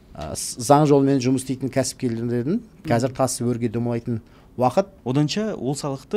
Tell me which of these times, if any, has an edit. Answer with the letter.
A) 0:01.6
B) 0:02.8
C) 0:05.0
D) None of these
C